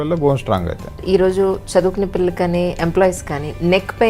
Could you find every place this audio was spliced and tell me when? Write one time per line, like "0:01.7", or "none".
0:01.0